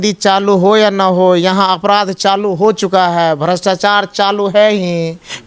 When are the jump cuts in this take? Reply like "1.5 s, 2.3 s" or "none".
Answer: none

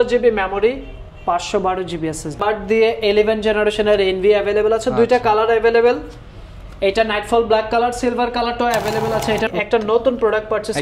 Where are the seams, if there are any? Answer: 2.4 s, 9.5 s

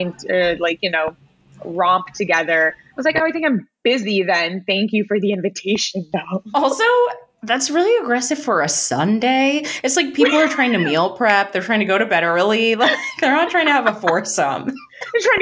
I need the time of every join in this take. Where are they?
none

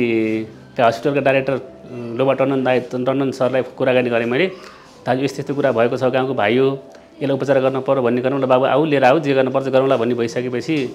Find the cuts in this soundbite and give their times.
none

